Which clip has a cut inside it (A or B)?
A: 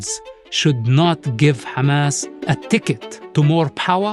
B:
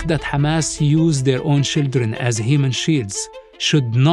A